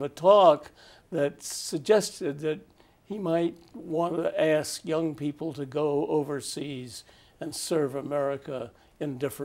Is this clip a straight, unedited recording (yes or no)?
yes